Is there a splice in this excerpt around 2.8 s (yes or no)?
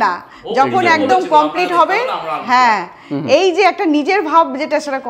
no